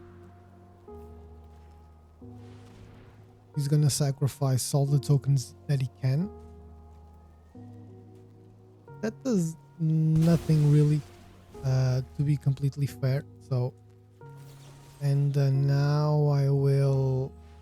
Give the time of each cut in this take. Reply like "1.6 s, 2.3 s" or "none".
1.7 s, 2.9 s, 6.3 s, 9.0 s